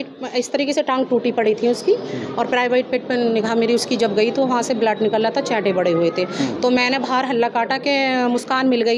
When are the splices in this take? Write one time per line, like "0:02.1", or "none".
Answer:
none

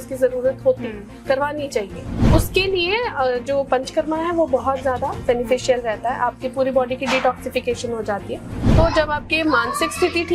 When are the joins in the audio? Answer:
0:02.2
0:08.6

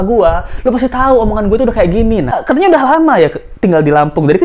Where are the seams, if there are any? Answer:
0:02.4

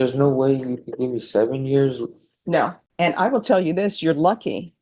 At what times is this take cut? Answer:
0:02.8

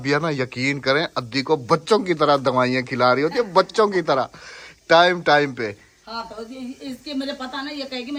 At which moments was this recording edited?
none

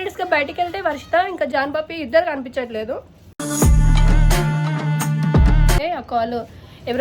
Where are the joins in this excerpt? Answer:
0:05.8

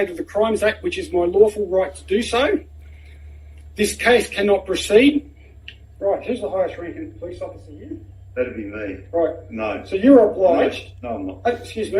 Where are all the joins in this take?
none

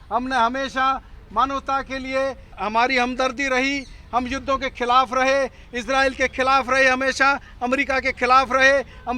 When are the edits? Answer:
0:02.6

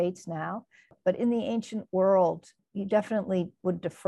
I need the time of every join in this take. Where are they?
0:01.0
0:02.5

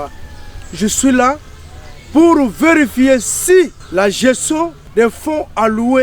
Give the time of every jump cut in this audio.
0:03.8
0:04.8

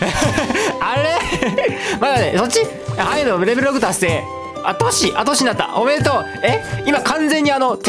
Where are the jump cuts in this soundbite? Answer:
none

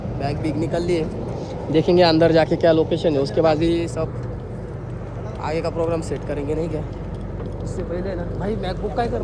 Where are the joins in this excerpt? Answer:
none

